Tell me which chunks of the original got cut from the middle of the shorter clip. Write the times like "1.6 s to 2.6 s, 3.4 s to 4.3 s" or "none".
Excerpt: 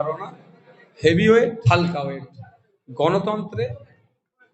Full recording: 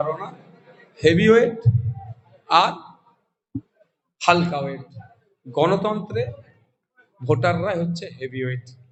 1.6 s to 4.2 s